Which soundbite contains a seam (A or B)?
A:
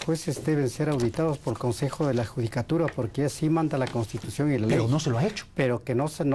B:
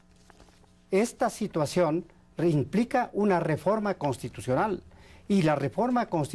B